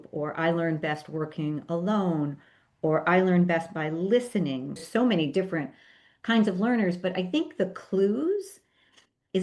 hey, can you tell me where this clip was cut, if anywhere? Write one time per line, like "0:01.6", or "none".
0:04.8